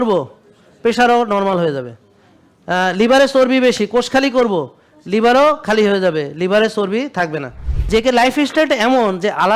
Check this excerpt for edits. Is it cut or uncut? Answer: cut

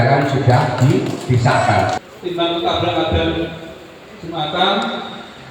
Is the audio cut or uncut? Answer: cut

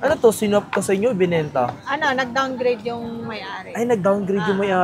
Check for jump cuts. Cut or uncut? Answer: uncut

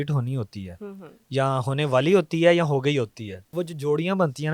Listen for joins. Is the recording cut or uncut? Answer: cut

